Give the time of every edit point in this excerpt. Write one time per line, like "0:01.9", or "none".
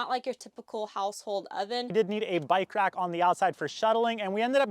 0:01.9

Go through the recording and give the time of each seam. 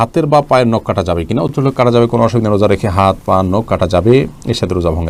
none

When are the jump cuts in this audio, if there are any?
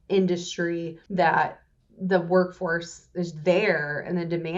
0:01.0

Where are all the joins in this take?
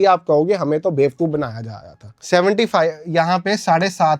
none

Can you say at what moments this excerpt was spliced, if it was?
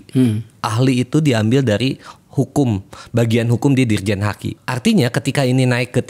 0:04.5

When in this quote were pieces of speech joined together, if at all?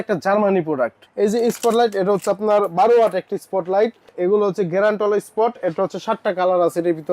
0:01.0
0:04.1

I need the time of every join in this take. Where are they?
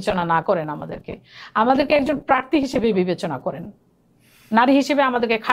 none

